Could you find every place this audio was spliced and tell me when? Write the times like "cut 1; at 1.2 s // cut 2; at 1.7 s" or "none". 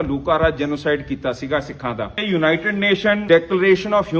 cut 1; at 2.2 s // cut 2; at 3.2 s